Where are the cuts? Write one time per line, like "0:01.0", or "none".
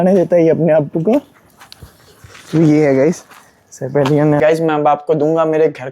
0:04.4